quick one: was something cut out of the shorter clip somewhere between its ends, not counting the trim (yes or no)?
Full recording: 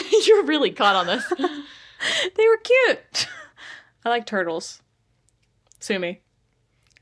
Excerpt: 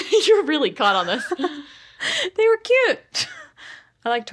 no